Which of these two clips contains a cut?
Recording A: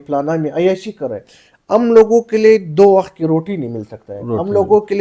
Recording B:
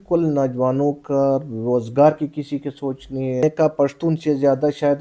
B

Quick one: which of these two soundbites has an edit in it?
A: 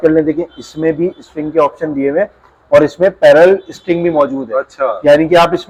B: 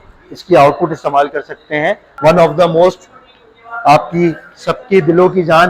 B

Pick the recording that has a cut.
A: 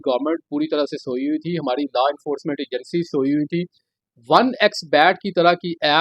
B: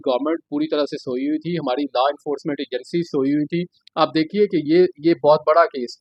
A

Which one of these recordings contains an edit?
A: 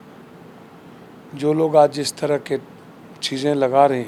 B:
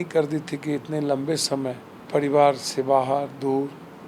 B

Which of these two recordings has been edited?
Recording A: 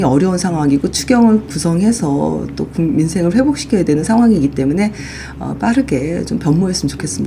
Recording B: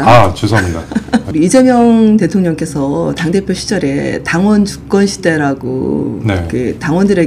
B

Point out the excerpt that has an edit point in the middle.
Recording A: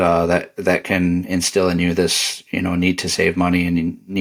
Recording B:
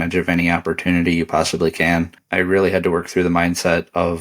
B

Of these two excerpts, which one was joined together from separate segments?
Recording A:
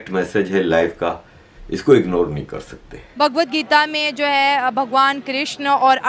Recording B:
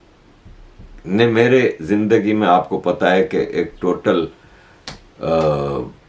A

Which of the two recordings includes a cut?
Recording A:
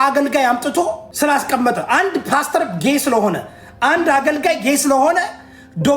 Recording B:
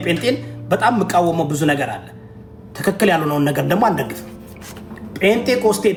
A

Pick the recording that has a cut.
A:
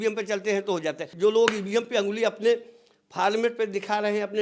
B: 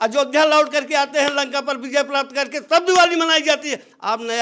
A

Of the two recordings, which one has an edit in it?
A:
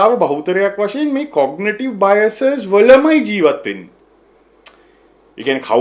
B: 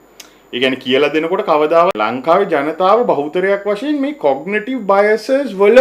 B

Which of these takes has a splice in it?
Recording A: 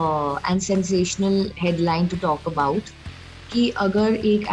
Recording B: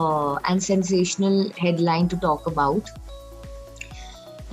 A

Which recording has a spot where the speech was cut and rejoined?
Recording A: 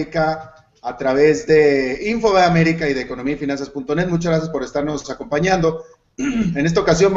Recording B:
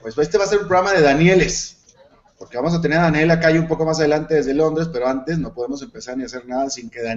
B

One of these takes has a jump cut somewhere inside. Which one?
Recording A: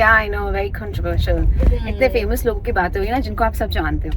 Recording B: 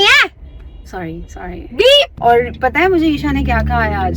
B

